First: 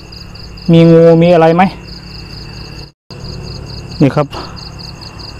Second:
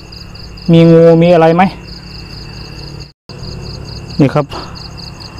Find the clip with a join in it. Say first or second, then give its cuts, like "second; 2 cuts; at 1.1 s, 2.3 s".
first; 1 cut; at 2.9 s